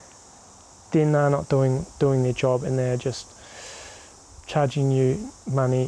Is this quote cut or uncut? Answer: uncut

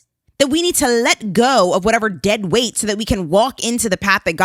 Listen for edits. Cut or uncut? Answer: uncut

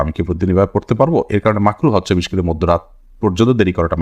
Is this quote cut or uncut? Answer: uncut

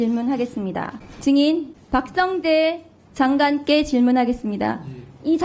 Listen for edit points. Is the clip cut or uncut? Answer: cut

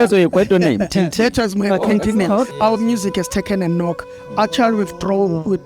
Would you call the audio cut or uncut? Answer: cut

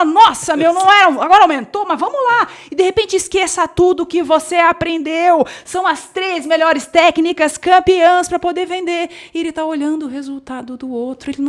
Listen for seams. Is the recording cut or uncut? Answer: uncut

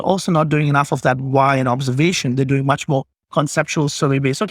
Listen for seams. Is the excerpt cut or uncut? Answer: uncut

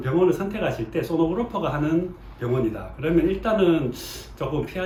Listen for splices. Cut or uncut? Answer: uncut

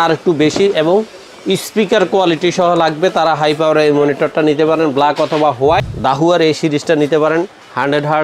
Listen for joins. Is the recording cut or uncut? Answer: cut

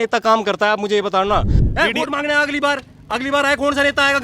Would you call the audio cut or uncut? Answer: cut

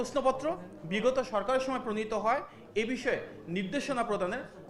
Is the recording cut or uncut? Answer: uncut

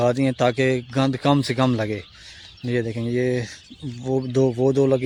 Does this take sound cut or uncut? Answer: uncut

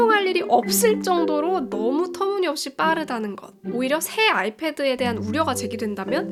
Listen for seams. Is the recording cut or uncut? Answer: uncut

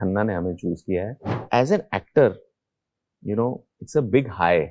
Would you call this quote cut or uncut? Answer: cut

